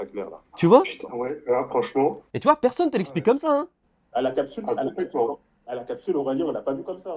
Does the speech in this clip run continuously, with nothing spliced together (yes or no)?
no